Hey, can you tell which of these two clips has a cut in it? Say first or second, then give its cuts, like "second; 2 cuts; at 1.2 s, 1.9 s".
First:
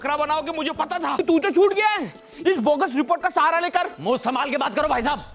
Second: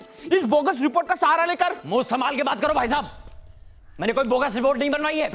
first; 1 cut; at 1.2 s